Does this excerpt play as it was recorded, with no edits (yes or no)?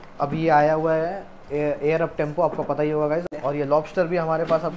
no